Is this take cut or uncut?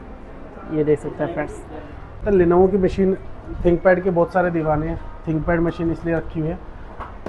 cut